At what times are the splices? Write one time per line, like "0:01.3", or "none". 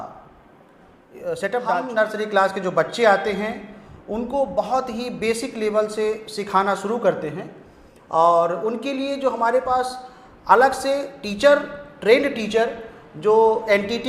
0:01.9

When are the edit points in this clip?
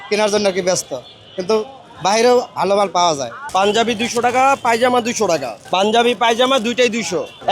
none

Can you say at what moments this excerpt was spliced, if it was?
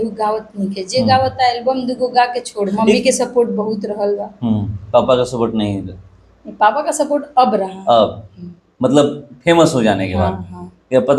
0:02.7

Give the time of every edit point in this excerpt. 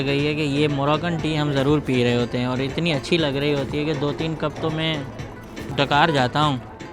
0:05.7

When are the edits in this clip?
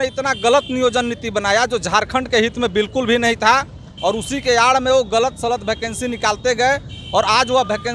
none

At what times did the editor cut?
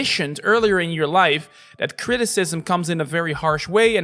none

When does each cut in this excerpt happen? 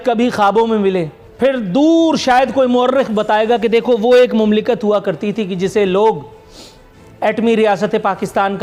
0:01.2

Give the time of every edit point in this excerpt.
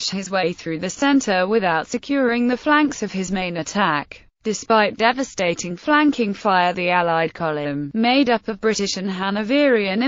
none

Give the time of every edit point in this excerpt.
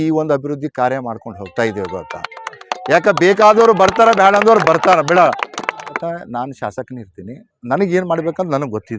0:05.9

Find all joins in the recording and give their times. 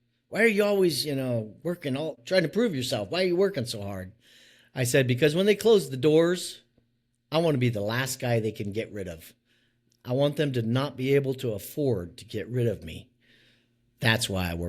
0:02.2

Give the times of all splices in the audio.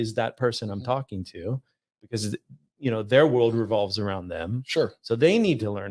none

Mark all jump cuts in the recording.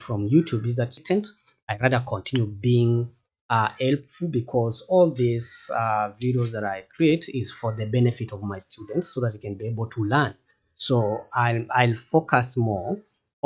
0:01.0

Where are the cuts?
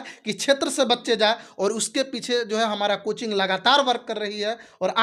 none

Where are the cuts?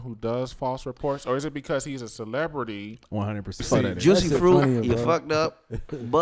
0:03.6

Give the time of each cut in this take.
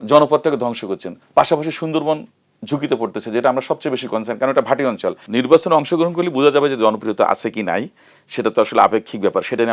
0:05.2

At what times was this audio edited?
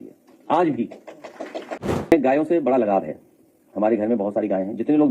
0:01.9

